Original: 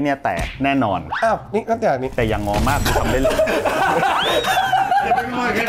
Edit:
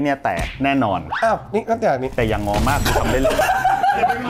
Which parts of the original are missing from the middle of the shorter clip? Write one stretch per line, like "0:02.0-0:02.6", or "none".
0:03.4-0:04.5